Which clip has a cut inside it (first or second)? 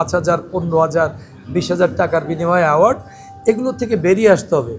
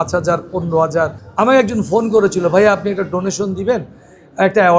second